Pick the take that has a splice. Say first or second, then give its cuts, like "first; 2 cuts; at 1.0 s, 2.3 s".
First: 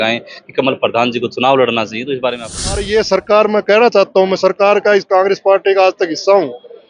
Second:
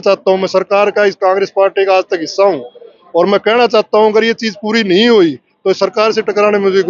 first; 1 cut; at 2.8 s